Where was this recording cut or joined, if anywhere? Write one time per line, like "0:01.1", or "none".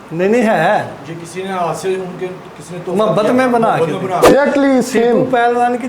0:04.3